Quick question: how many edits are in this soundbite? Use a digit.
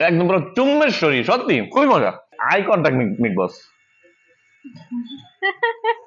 1